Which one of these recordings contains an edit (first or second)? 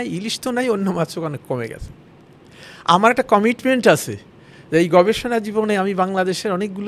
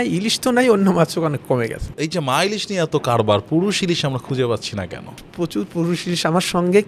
second